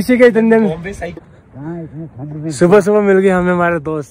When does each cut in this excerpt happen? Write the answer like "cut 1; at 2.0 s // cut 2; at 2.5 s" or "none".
cut 1; at 1.2 s